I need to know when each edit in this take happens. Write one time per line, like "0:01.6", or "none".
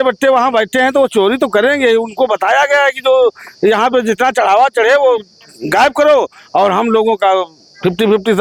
none